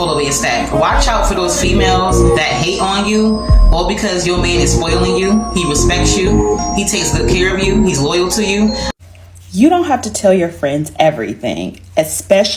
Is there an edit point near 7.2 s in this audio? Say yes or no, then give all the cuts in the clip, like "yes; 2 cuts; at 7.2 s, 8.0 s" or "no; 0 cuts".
no; 1 cut; at 8.9 s